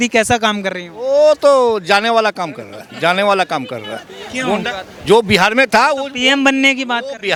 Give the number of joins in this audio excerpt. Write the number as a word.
zero